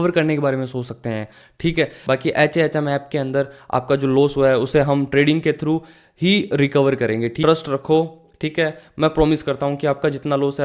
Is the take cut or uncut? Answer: cut